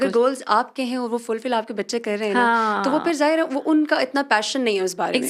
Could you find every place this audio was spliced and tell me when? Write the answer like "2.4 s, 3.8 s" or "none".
none